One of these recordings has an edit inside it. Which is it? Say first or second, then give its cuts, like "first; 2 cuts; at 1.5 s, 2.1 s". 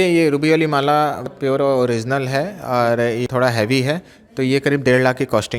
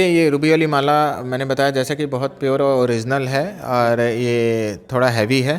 first; 2 cuts; at 1.3 s, 3.2 s